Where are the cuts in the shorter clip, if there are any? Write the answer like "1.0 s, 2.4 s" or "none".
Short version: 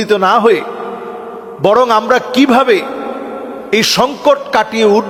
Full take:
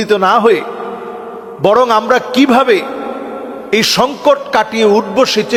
none